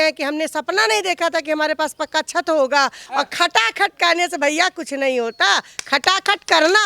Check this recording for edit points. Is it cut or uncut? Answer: cut